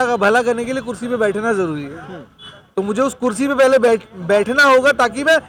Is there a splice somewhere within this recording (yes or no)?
no